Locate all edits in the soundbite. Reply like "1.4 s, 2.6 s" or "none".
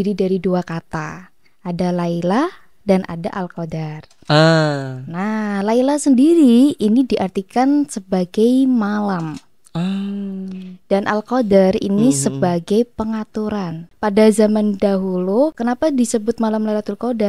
13.9 s, 15.6 s